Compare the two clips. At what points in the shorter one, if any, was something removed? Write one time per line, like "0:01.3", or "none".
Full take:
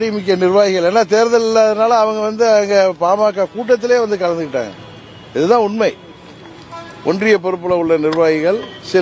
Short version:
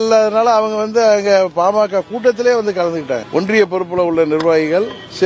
0:03.2